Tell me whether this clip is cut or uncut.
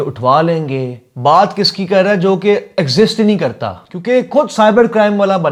uncut